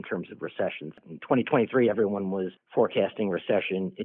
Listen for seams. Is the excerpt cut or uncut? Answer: cut